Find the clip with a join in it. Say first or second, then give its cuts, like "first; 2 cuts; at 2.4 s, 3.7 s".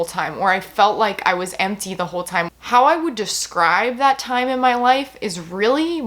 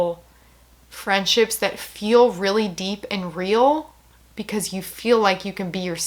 first; 1 cut; at 2.5 s